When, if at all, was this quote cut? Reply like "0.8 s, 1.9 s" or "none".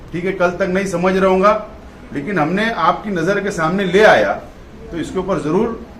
none